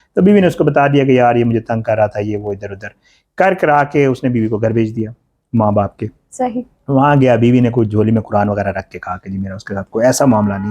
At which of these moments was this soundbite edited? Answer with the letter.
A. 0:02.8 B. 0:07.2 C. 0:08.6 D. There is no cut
D